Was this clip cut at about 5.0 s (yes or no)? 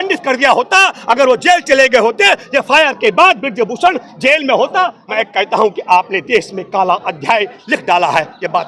yes